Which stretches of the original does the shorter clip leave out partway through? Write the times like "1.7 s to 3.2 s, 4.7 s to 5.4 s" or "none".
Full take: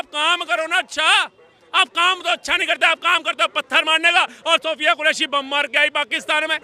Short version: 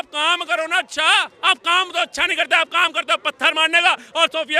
1.3 s to 1.6 s